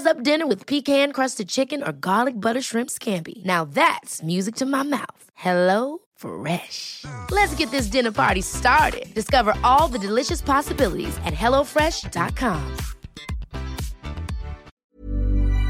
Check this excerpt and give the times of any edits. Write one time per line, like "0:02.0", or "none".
0:14.7